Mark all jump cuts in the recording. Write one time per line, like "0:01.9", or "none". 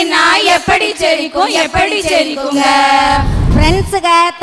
0:03.4